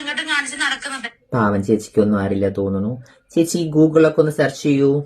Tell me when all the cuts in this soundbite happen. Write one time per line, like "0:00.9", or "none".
0:04.0